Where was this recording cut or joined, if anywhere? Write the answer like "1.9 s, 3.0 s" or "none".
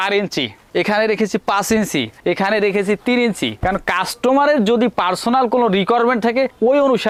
none